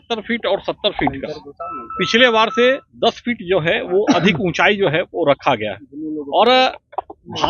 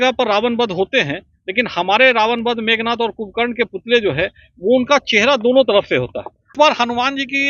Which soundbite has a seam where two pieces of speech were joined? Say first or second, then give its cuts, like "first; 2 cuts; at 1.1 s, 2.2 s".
second; 1 cut; at 6.5 s